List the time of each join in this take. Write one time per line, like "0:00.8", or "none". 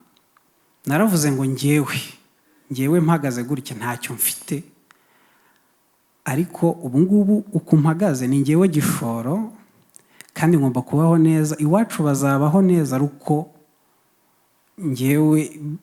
none